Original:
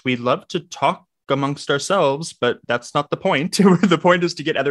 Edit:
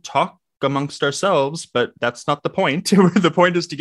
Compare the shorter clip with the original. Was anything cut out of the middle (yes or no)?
no